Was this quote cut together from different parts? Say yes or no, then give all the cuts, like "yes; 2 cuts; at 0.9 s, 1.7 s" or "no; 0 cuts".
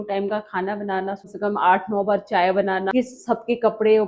yes; 2 cuts; at 1.3 s, 2.9 s